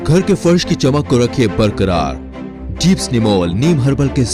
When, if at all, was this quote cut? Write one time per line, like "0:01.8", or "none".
none

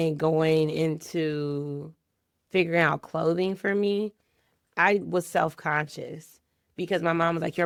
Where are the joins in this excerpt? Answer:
none

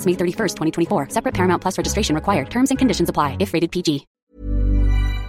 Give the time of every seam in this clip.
0:04.1

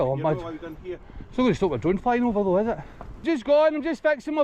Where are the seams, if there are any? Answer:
0:03.2

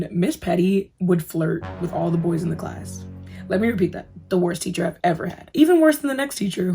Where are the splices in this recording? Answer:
0:04.1

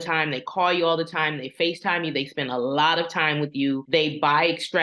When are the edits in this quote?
0:03.8

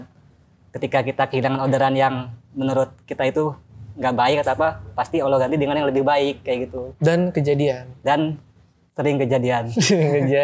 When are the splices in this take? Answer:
none

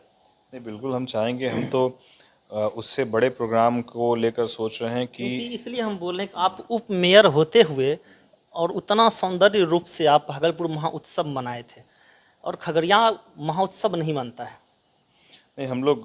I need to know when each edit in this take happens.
none

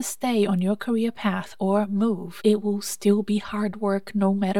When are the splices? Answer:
0:02.3

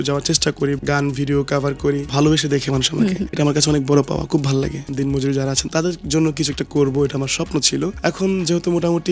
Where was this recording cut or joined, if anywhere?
0:00.8
0:02.1
0:03.3
0:04.9
0:08.0

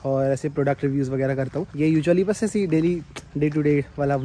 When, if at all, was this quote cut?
0:01.7

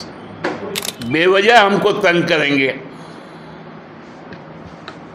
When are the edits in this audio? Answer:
0:00.9

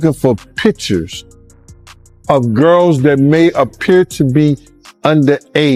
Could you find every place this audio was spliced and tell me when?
none

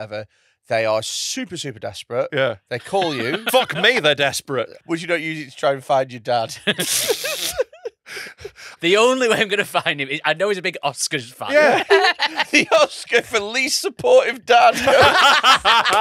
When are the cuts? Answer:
0:03.5
0:04.8
0:08.7
0:12.4

